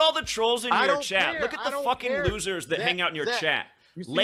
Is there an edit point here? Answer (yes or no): no